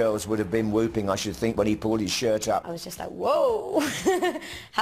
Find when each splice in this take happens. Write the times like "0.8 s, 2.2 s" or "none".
none